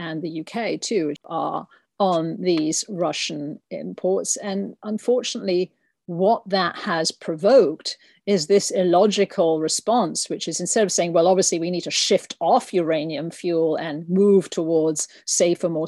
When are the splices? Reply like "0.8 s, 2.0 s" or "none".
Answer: 1.3 s